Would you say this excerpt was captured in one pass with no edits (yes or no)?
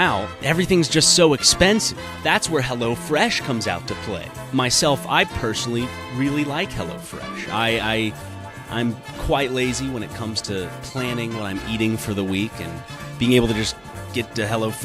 no